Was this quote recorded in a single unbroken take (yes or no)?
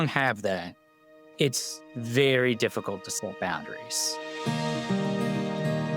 no